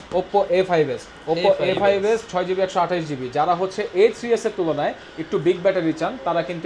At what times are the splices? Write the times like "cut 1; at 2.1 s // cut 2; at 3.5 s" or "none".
none